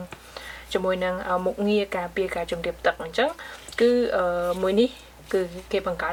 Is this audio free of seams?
yes; 0 cuts

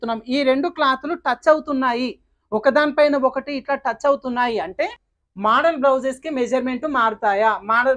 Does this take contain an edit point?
yes; 1 cut; at 5.1 s

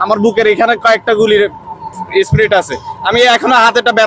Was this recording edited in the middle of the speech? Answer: no; 0 cuts

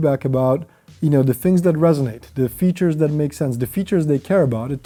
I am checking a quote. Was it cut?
no; 0 cuts

